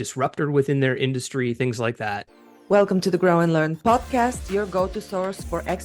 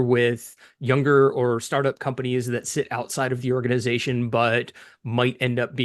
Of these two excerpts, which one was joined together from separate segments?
first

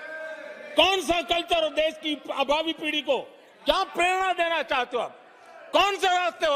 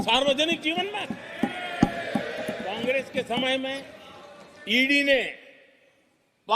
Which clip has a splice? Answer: second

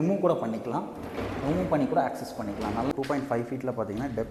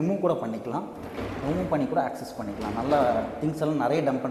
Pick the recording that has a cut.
first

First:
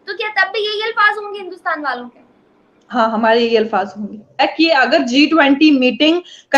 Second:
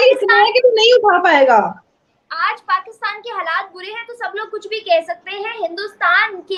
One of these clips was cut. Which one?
first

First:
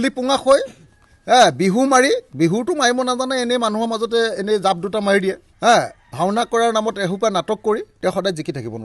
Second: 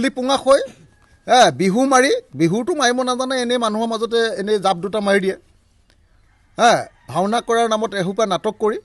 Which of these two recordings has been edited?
first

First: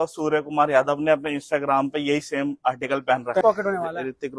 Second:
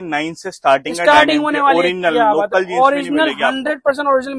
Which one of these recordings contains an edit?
first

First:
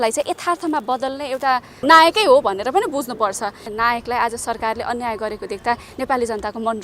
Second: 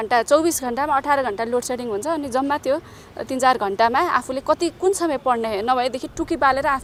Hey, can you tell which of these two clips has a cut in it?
first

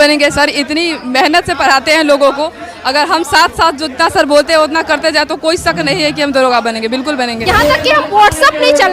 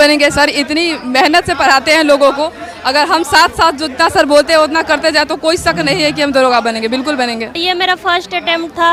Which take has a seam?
first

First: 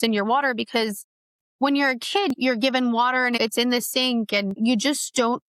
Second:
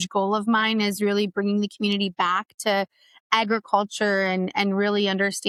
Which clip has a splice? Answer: first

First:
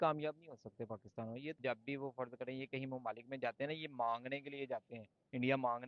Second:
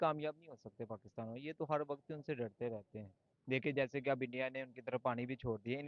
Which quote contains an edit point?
first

